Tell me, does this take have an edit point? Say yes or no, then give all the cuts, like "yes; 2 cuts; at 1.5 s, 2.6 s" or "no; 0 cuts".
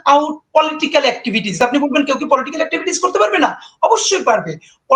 yes; 1 cut; at 1.5 s